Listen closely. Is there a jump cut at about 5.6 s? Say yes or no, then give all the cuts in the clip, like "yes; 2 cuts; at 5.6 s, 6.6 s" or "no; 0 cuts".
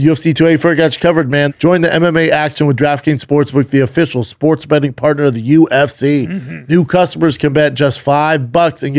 no; 1 cut; at 1.5 s